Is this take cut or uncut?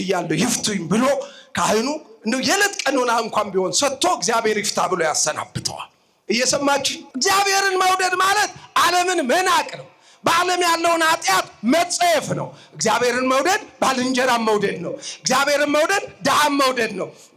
cut